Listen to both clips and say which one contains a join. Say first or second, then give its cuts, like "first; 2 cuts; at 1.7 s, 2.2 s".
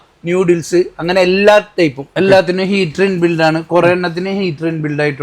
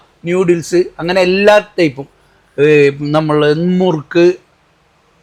first; 1 cut; at 2.0 s